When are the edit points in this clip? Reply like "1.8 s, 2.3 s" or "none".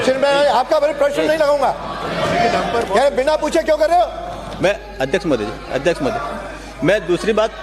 none